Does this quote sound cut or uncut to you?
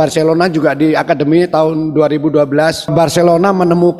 cut